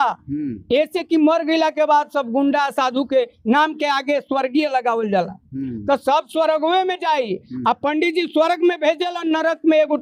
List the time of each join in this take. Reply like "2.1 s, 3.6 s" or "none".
none